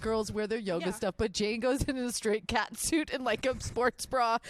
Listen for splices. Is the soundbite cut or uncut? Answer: uncut